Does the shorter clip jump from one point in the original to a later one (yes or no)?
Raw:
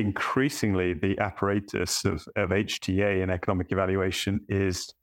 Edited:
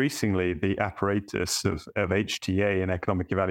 no